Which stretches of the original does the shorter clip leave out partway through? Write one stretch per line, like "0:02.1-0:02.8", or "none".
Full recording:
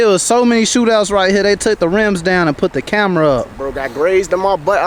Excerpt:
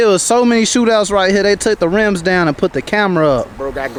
none